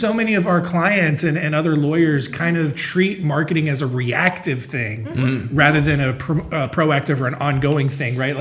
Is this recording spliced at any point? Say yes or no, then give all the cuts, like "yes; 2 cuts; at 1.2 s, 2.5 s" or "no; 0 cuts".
no; 0 cuts